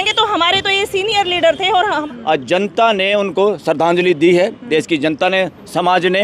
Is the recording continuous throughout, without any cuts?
no; 1 cut; at 2.0 s

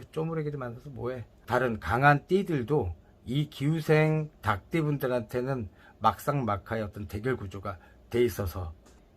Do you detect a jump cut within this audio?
yes; 1 cut; at 1.3 s

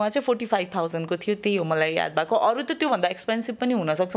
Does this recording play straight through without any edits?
yes; 0 cuts

